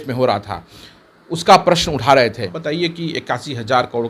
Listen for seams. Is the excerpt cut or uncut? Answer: cut